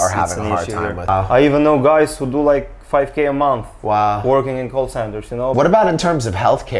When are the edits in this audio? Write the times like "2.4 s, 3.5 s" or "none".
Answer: 1.1 s, 5.5 s